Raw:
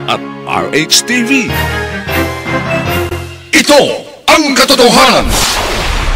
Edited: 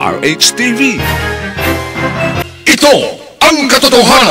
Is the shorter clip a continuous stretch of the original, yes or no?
no